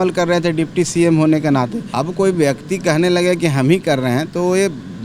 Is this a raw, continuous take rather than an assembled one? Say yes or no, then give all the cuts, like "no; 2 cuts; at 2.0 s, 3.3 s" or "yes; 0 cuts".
no; 1 cut; at 1.8 s